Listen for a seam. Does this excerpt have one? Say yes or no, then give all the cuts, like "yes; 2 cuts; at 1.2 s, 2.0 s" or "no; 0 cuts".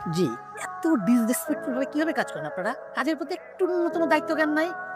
no; 0 cuts